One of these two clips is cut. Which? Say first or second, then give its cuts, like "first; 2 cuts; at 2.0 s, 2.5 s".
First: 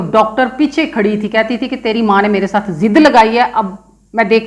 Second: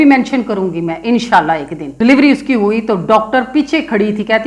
second; 1 cut; at 1.8 s